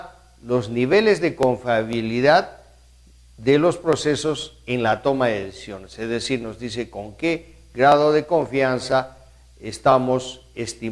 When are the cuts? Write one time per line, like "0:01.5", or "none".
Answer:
0:03.2